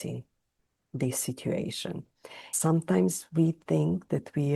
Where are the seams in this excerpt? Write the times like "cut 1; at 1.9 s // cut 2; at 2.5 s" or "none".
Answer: cut 1; at 2.5 s